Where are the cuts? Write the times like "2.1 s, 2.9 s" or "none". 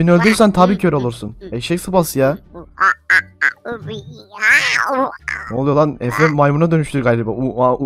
none